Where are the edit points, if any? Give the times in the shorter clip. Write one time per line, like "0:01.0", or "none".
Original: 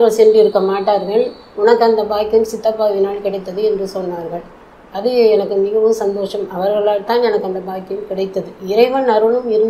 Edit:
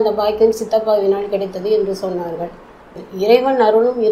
0:03.0